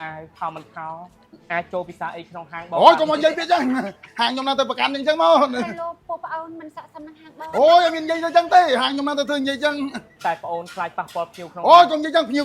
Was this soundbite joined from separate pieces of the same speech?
no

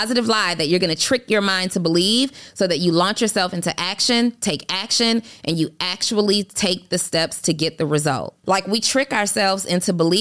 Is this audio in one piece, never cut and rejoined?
no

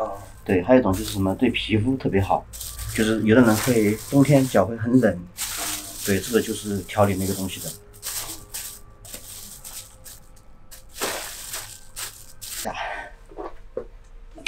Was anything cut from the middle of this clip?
no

